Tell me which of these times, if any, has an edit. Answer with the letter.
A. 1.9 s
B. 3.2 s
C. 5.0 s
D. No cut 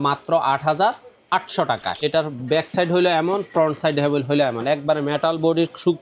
A